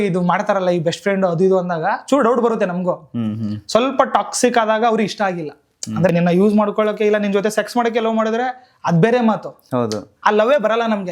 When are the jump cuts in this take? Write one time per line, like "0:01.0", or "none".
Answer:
0:06.1